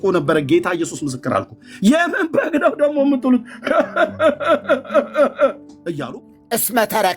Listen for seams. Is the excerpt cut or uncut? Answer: cut